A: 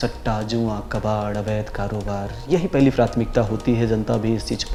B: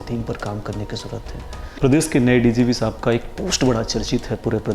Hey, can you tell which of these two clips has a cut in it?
B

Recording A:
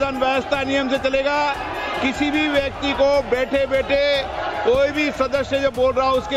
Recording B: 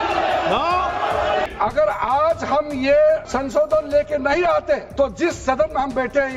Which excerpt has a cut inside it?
B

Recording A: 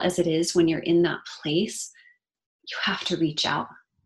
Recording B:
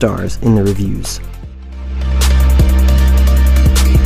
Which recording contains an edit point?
B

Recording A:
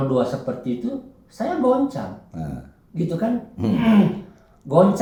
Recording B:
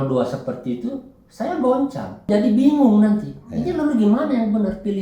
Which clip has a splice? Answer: B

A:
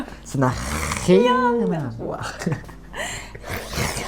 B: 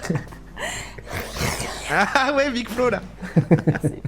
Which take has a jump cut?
B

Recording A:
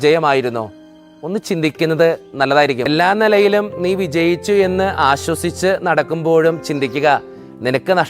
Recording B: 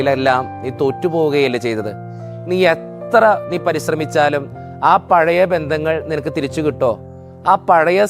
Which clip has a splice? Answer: A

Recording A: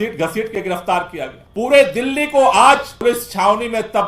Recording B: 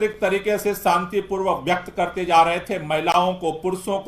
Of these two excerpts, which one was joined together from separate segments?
A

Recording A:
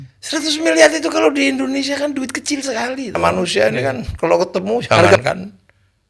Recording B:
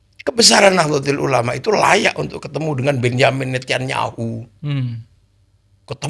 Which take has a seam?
A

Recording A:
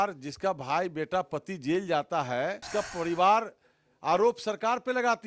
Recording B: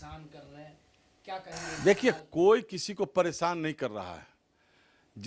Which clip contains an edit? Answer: A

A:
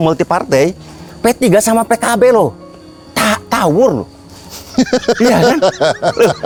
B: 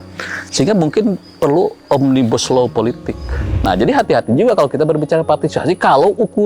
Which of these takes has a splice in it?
B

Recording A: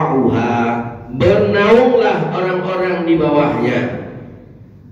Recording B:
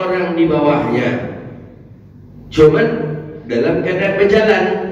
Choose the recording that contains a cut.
A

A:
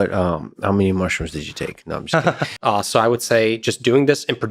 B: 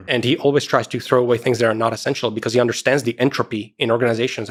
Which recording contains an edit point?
A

